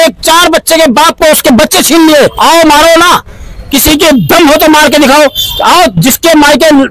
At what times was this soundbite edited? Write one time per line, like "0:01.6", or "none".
0:02.4